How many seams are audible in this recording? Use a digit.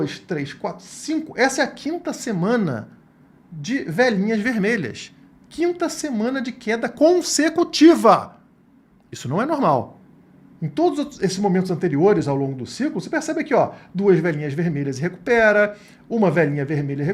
0